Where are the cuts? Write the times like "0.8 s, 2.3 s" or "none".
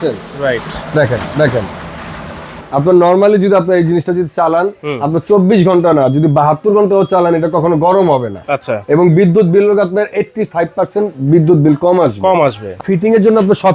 2.5 s, 12.7 s